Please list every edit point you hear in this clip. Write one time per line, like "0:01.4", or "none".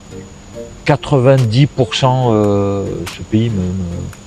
none